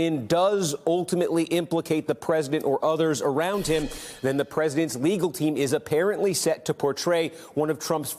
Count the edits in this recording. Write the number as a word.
one